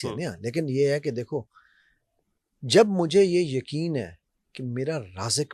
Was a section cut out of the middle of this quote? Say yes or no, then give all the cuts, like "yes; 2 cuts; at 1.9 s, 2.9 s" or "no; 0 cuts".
no; 0 cuts